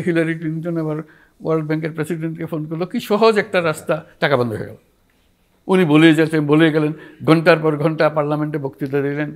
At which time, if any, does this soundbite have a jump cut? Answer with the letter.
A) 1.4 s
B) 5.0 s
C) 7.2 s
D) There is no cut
D